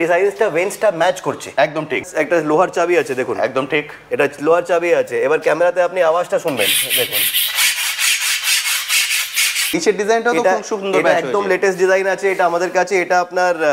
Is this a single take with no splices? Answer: no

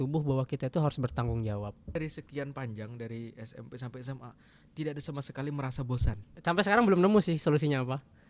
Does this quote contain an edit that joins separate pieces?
yes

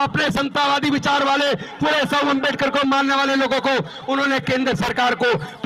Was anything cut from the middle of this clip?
no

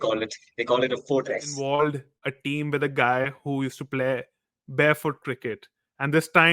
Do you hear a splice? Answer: yes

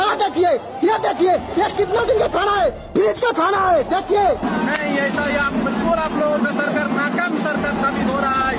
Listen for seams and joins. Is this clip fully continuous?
no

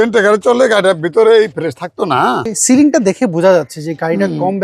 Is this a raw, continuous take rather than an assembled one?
no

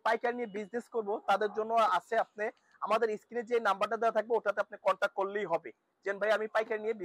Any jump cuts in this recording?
no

